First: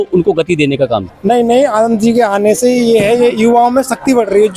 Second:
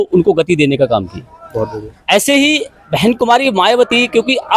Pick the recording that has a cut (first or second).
first